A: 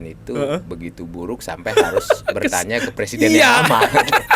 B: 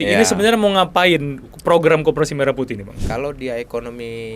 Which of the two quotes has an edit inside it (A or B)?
B